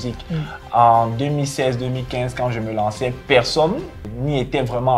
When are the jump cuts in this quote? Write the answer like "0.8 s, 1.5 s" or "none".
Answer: 4.0 s